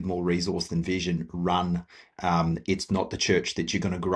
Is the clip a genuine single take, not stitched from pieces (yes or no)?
yes